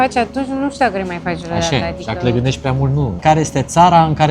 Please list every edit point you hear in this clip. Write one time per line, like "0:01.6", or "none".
0:03.2

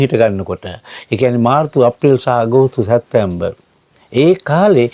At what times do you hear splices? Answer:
none

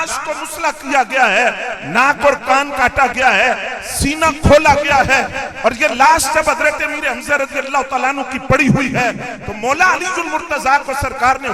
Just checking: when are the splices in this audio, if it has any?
none

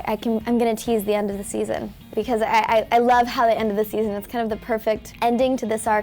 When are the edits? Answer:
0:02.1
0:05.1

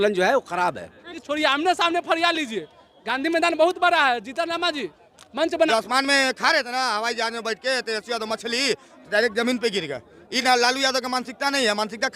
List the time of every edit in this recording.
0:01.2
0:05.7
0:10.2

